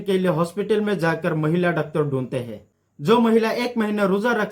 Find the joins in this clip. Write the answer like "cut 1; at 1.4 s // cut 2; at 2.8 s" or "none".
cut 1; at 2.7 s